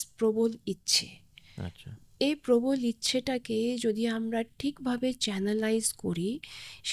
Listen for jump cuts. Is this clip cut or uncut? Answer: uncut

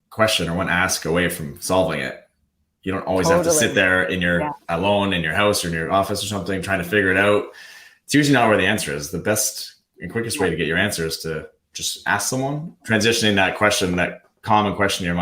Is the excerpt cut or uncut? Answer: cut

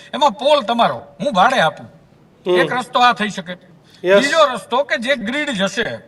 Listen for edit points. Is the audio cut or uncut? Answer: uncut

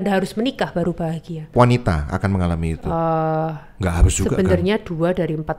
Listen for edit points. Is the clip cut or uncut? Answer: cut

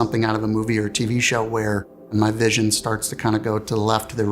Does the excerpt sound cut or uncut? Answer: cut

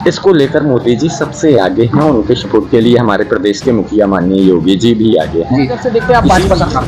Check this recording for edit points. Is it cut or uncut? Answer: cut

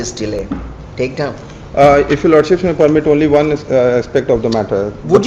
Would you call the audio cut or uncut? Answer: uncut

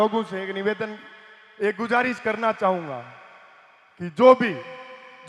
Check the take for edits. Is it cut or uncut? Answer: uncut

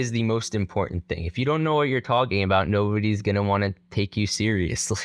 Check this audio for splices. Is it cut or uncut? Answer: uncut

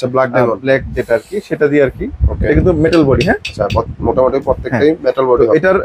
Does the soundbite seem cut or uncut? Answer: uncut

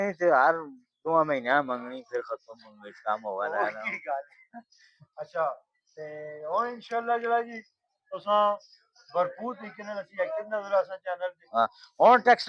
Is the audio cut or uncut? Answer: uncut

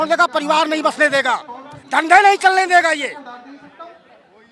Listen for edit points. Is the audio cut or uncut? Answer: uncut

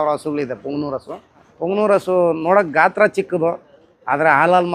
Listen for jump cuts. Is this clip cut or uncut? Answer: cut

